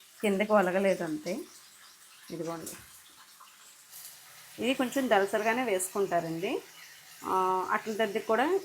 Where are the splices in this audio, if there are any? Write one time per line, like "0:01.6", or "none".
0:03.9